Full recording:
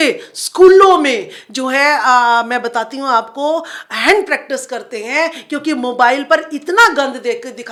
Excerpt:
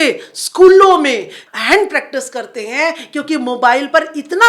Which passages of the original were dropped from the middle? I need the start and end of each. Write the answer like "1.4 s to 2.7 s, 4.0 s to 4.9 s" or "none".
1.4 s to 3.8 s